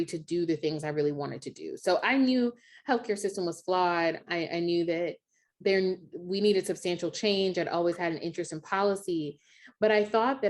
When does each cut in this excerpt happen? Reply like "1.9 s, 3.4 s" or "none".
4.2 s, 5.4 s